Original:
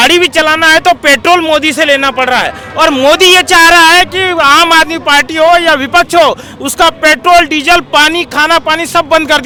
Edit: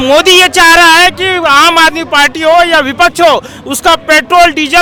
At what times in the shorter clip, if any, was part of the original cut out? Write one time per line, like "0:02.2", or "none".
none